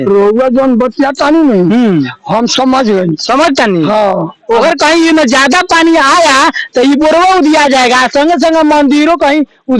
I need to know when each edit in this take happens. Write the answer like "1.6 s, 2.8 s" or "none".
4.6 s

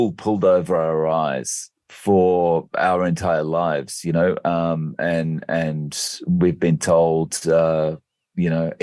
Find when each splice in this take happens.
none

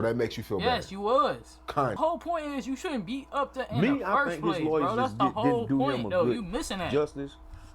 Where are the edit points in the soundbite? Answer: 2.0 s

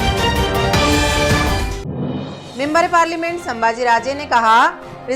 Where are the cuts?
2.3 s

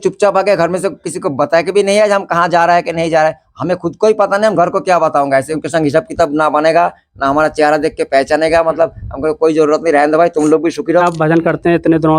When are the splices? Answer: 5.5 s, 11.0 s

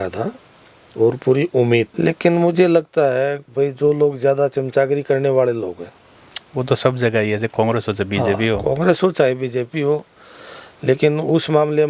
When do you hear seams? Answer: 1.9 s

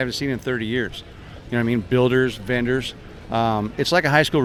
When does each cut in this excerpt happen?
none

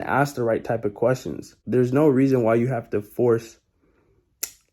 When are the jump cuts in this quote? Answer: 1.6 s

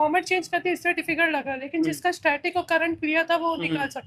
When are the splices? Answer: none

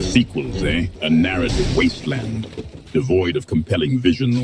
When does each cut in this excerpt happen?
1.0 s

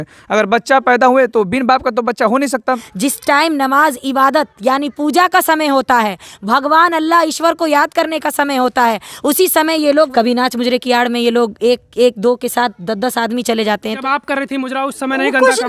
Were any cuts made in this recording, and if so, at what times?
2.9 s, 10.1 s, 14.0 s

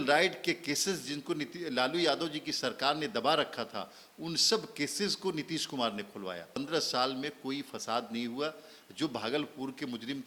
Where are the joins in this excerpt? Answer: 6.6 s

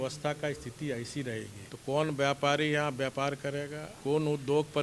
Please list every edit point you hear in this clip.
1.6 s, 3.8 s

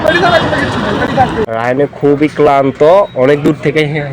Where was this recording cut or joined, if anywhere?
1.5 s

